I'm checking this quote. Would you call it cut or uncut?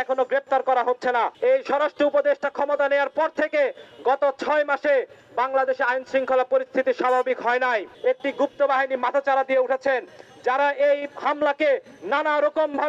cut